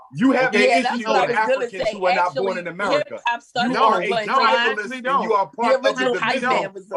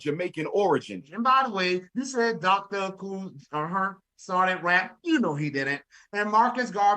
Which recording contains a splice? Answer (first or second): second